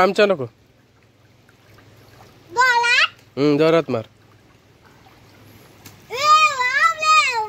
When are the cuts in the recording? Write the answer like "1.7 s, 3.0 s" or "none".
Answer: none